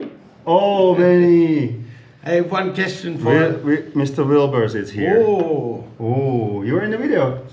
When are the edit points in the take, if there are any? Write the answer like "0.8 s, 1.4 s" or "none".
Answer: none